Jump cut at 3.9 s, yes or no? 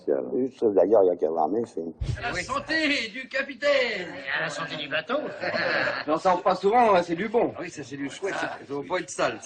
no